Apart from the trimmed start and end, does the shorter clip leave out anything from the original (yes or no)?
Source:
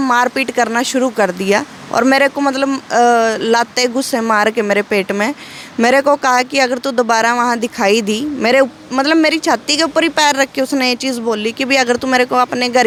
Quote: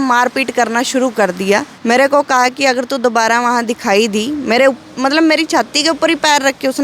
yes